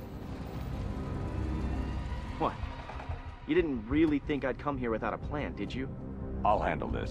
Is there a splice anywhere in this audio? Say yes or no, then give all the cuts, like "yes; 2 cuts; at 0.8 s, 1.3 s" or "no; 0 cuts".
no; 0 cuts